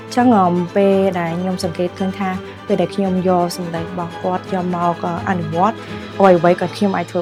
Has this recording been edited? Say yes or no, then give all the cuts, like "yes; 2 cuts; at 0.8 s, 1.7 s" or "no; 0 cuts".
no; 0 cuts